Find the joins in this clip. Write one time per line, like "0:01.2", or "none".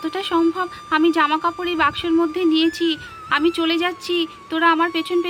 none